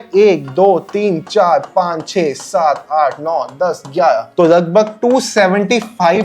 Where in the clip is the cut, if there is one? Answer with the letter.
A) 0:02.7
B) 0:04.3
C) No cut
B